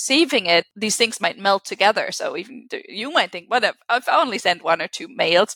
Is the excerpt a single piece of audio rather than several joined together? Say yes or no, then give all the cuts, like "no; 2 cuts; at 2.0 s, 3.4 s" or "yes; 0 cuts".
yes; 0 cuts